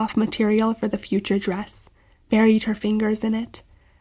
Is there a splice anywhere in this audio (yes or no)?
no